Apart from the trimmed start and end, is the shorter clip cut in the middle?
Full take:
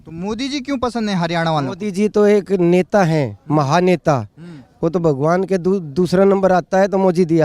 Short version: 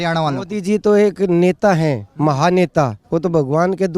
yes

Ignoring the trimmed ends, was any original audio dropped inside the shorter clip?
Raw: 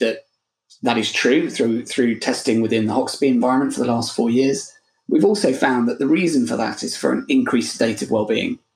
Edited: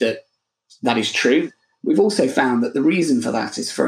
yes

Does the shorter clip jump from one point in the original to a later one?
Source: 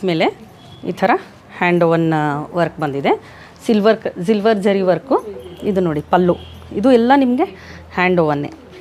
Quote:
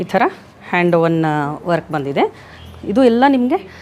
yes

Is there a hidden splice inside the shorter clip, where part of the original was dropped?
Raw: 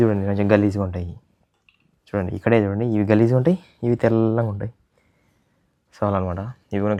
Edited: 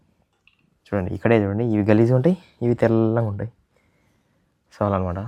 no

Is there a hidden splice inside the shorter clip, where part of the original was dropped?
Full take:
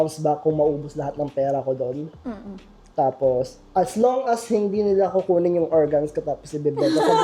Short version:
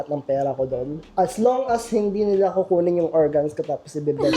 yes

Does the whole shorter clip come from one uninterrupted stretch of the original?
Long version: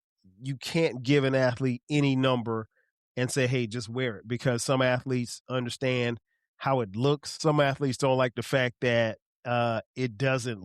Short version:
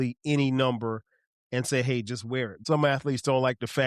no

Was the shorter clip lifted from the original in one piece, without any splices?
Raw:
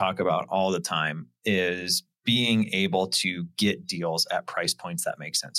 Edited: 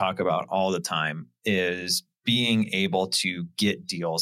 yes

